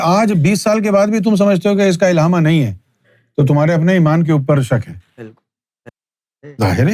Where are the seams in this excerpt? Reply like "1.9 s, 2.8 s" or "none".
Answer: 5.9 s